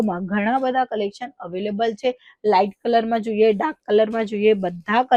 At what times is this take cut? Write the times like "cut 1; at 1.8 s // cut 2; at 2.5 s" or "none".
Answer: none